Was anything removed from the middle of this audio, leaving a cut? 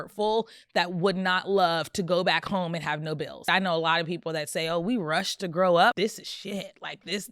yes; 2 cuts; at 3.5 s, 6.0 s

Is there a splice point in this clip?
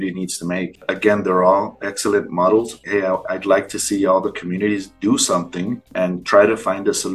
yes; 2 cuts; at 0.8 s, 2.8 s

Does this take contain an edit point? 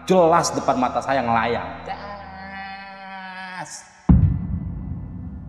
yes; 1 cut; at 4.0 s

